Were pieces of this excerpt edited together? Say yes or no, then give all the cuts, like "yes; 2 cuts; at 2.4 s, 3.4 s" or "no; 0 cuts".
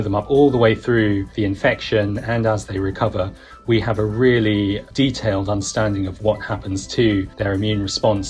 yes; 2 cuts; at 1.3 s, 7.3 s